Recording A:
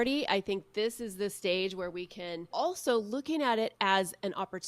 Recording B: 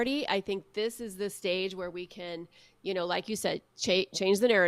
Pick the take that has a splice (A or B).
A